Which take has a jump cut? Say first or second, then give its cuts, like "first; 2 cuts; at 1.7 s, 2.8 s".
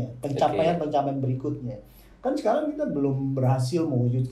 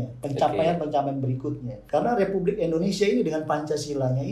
second; 1 cut; at 1.7 s